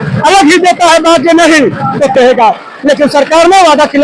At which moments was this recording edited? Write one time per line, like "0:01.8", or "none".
0:02.1